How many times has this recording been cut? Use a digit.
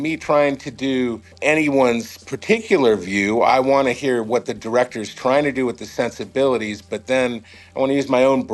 2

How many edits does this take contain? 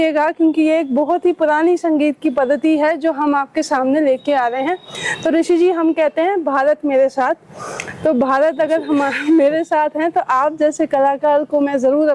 0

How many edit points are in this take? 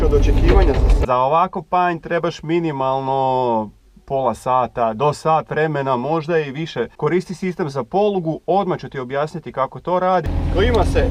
3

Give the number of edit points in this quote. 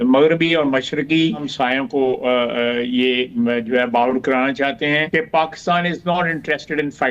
2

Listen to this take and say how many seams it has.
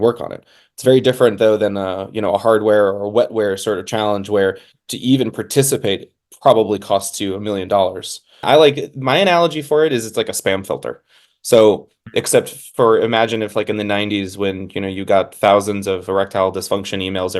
1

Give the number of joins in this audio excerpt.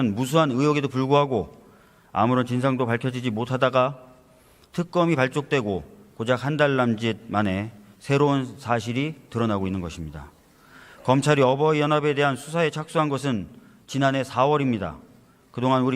1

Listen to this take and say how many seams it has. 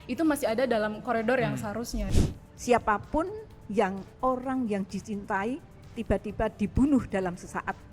1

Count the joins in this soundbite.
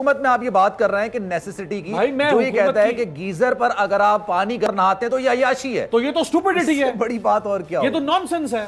0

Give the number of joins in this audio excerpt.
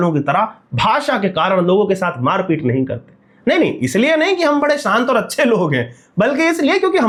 0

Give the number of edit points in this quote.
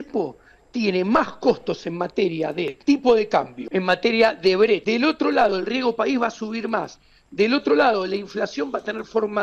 3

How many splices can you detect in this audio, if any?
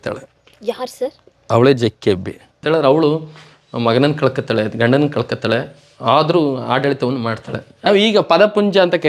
2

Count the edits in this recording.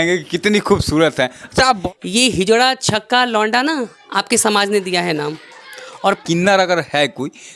2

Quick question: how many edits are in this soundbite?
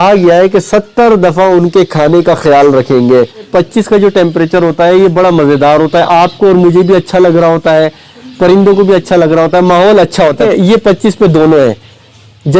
2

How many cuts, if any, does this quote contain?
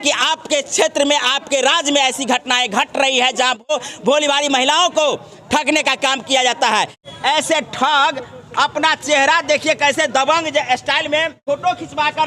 3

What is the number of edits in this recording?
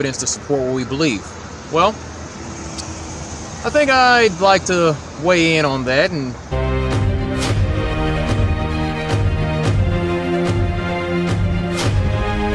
0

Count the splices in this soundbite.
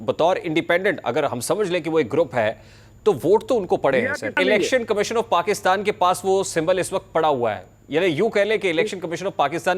1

